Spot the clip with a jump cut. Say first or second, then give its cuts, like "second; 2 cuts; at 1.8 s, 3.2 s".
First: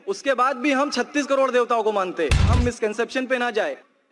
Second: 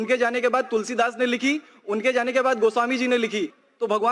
first; 1 cut; at 2.5 s